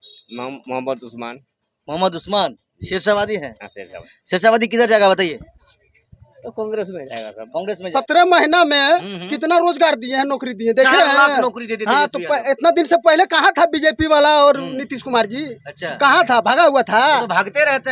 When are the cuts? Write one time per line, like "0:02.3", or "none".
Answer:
0:04.0
0:07.9